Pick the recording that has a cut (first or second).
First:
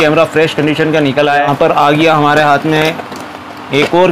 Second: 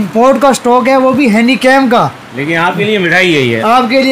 first